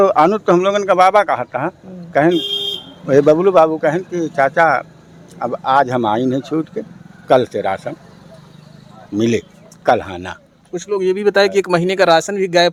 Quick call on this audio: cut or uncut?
uncut